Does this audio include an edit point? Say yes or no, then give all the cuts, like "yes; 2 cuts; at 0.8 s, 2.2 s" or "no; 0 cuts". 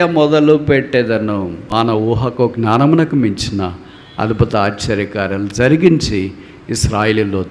yes; 1 cut; at 1.7 s